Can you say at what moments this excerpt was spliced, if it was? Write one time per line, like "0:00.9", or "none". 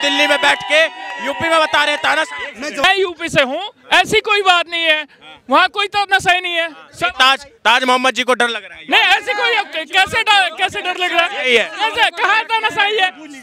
0:02.8